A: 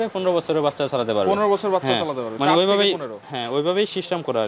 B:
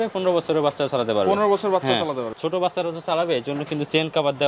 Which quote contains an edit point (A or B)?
B